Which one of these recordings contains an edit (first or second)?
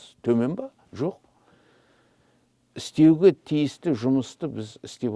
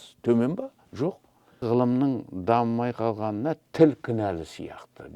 second